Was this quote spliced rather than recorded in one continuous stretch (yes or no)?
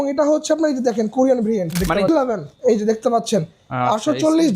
yes